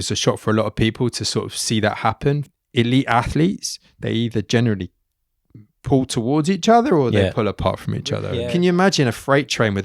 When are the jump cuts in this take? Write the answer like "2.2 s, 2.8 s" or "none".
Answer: 2.4 s, 8.3 s